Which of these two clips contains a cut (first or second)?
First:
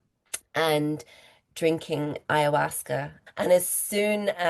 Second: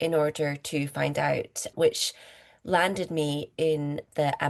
first